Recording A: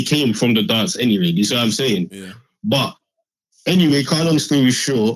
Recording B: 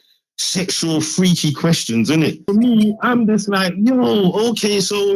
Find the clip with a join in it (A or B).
B